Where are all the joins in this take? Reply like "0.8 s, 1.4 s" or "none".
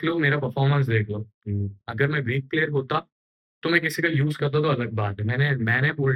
none